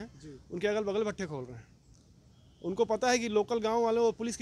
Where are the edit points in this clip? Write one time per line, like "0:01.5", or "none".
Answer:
none